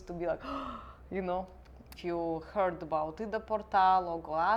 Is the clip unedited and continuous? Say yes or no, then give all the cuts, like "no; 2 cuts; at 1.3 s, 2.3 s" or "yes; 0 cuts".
no; 1 cut; at 1.8 s